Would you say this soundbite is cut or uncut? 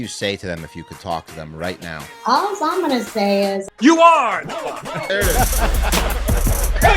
cut